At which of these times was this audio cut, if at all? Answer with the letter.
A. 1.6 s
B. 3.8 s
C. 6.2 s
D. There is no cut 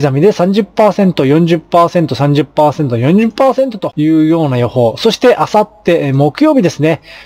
B